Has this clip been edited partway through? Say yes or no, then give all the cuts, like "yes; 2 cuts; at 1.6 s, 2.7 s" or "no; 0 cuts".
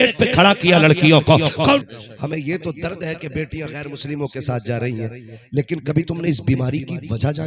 yes; 1 cut; at 1.8 s